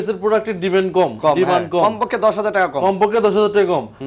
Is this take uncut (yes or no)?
yes